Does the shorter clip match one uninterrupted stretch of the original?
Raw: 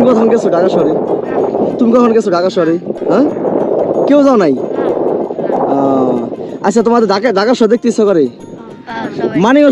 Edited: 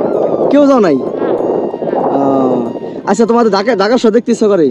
yes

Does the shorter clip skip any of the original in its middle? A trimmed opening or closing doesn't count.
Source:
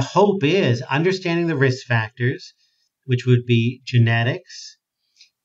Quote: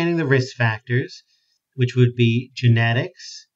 no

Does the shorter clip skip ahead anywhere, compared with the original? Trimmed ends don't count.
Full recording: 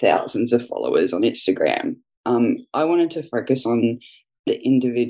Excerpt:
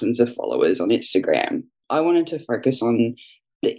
yes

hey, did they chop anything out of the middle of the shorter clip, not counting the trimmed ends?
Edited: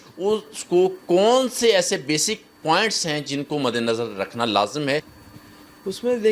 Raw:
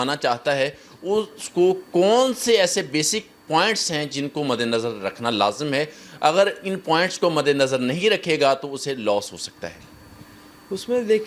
yes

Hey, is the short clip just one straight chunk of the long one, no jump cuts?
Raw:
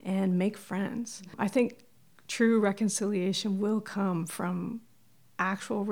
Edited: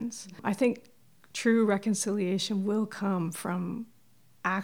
yes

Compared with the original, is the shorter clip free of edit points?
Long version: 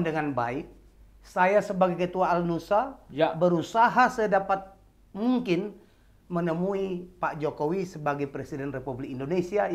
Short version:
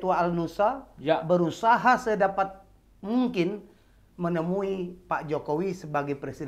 yes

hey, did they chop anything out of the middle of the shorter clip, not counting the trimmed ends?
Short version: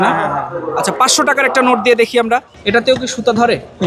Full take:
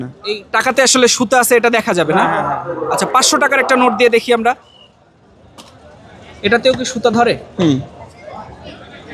yes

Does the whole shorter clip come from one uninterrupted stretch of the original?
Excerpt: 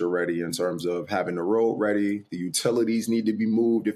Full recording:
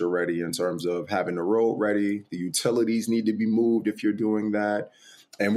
yes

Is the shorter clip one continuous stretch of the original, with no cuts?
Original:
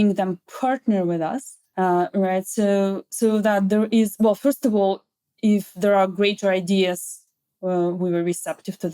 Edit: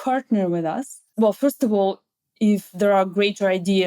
no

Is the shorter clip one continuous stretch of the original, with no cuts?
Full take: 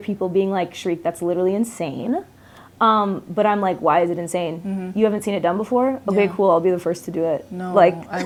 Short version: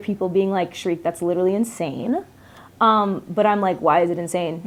yes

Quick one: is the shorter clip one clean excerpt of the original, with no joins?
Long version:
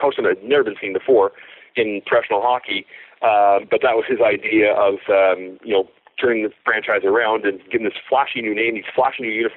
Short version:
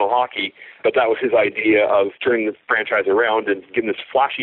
no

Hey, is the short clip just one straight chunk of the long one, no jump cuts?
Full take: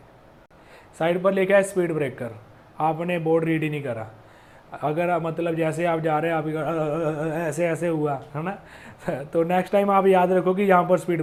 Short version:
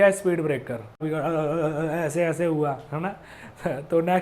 no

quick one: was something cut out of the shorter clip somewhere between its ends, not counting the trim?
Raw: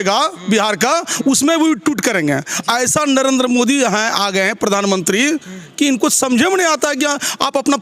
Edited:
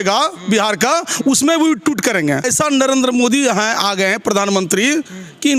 yes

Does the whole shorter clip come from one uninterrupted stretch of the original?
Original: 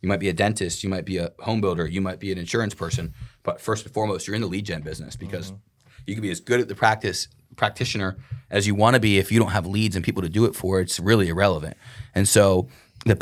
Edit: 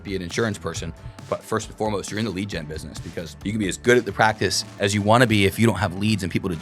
no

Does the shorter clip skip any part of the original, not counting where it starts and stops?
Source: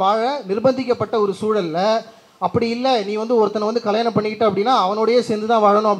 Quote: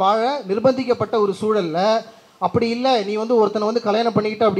no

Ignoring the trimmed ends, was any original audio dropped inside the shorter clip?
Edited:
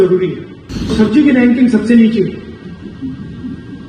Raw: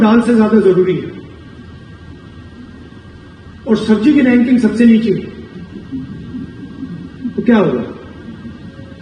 yes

